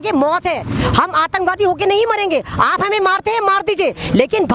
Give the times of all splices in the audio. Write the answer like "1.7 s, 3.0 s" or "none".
none